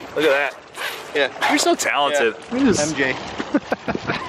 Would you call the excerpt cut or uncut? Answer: cut